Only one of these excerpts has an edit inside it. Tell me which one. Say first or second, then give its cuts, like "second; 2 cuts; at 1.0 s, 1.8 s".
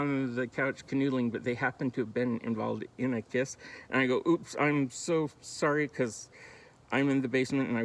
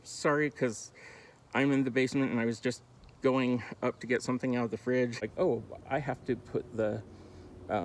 second; 1 cut; at 5.2 s